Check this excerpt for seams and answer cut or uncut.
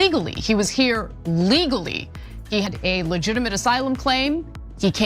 cut